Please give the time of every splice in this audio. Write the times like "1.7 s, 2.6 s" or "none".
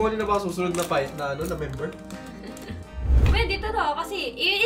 3.3 s